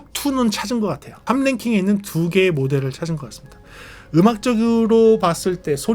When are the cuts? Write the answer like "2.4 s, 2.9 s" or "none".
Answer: 1.1 s